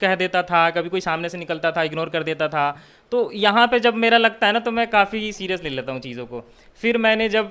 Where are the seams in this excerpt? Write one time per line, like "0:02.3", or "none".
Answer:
none